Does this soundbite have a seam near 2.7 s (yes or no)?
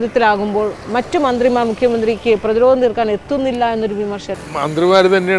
no